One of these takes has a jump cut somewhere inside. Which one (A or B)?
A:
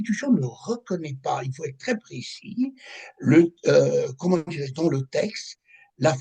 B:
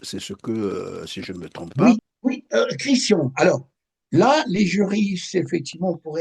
B